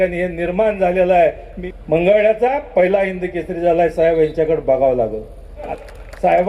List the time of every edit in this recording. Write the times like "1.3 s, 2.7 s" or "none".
1.5 s, 5.7 s